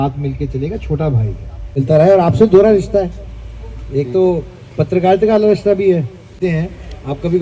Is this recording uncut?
no; 2 cuts; at 1.8 s, 6.3 s

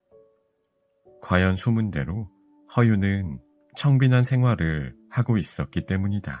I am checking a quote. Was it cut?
yes; 1 cut; at 1.2 s

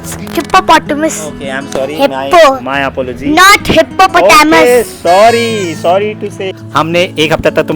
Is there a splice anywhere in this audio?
yes; 2 cuts; at 5.8 s, 6.6 s

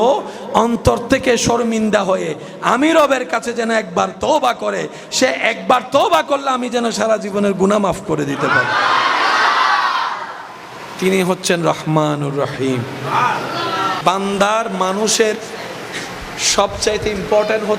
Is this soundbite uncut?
no; 1 cut; at 14.0 s

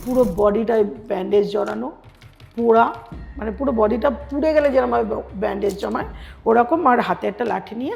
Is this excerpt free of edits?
yes; 0 cuts

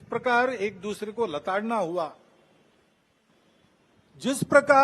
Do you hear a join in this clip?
no; 0 cuts

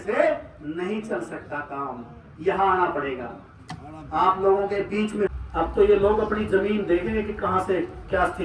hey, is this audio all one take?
no; 1 cut; at 5.3 s

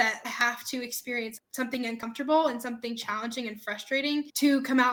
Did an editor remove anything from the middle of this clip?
no; 0 cuts

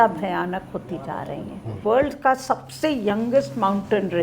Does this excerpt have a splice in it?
yes; 1 cut; at 1.8 s

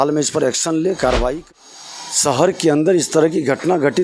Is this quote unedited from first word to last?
no; 1 cut; at 1.4 s

